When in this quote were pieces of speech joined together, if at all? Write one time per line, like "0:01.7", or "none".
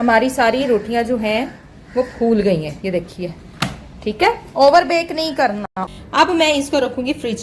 0:05.8